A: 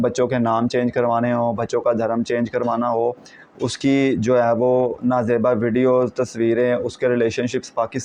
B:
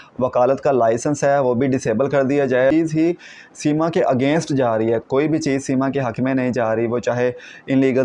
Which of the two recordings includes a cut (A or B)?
B